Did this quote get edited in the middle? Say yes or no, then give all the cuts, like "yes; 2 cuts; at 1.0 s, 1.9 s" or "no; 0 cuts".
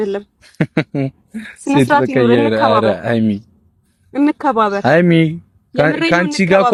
no; 0 cuts